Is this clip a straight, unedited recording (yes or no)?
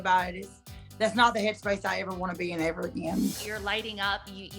no